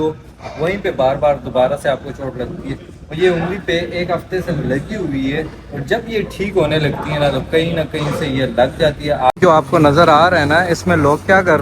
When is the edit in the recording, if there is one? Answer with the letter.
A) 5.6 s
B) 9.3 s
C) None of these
B